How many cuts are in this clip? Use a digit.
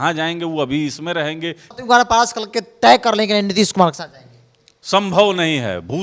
1